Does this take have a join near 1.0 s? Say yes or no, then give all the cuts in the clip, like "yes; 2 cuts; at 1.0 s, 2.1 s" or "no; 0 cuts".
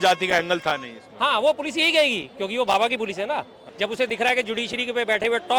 no; 1 cut; at 3.6 s